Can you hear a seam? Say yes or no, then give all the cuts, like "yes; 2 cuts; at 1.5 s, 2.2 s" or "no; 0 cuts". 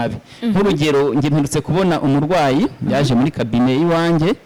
no; 0 cuts